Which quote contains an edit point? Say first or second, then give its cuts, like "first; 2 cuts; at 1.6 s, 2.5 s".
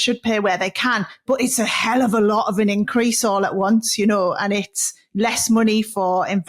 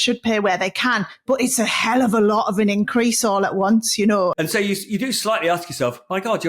second; 1 cut; at 4.4 s